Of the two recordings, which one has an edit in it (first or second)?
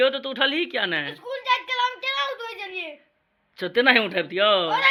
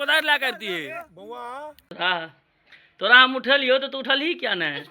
second